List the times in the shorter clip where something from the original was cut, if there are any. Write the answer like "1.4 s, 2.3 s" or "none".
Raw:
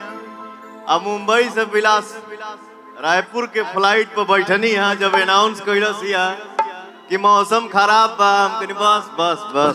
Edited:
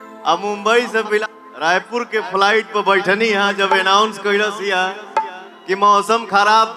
1.2 s